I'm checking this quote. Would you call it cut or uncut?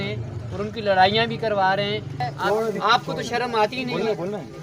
cut